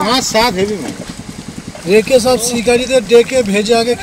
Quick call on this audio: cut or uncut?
uncut